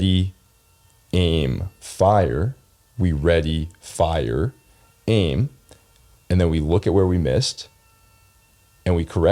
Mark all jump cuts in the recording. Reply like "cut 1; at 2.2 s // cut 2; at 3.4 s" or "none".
none